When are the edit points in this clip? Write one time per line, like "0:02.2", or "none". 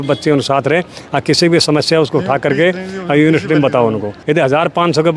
0:04.1